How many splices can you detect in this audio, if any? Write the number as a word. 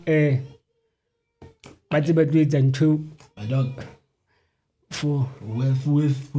zero